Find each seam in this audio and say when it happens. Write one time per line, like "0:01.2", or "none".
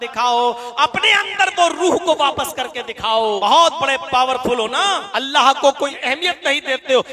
0:03.4
0:05.1
0:06.0